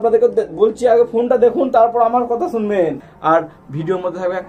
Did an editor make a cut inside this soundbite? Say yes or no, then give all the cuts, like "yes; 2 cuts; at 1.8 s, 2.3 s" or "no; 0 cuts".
yes; 1 cut; at 3.1 s